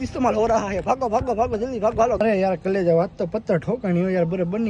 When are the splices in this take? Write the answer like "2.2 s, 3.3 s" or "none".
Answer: 0.8 s, 2.2 s